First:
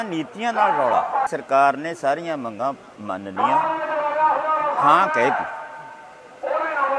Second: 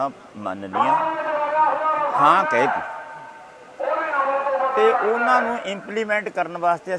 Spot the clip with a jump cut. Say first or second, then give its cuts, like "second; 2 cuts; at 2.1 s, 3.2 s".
first; 1 cut; at 1.3 s